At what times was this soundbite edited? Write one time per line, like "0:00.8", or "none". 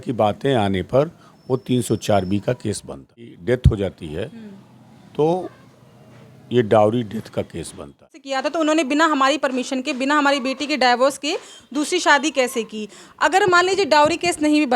0:03.4
0:08.2